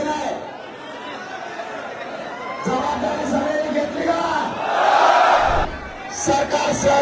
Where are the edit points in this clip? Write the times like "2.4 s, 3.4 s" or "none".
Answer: 5.7 s

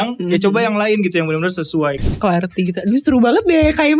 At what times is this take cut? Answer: 2.0 s

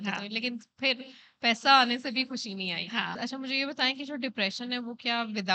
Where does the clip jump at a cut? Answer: 3.2 s

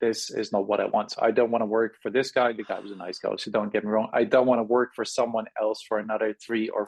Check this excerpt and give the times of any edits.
none

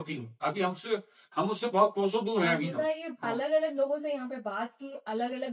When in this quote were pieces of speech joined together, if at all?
2.7 s

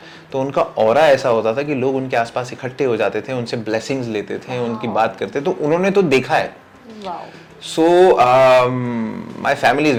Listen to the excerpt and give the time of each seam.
none

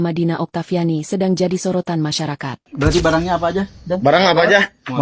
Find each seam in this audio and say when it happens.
2.7 s

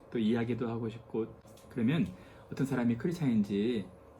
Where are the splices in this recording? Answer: 1.4 s

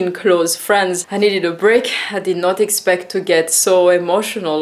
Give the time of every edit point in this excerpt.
1.0 s

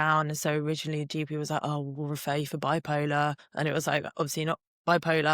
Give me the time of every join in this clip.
3.4 s

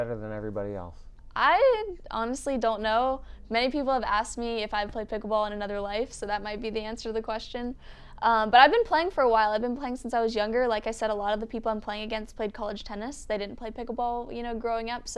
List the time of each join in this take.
none

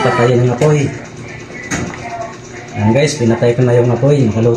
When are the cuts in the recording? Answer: none

